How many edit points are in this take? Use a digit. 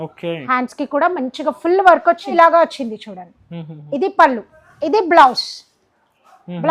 1